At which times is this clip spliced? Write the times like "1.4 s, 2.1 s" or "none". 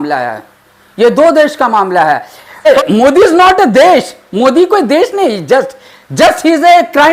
2.7 s